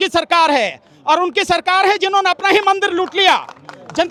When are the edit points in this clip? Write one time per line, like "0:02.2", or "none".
none